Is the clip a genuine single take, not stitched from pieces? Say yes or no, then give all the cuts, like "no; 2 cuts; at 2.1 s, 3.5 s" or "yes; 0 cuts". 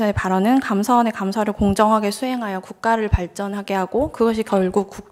yes; 0 cuts